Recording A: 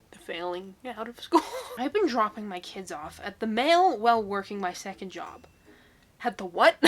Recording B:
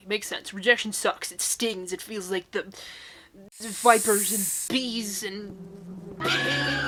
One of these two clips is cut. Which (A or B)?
A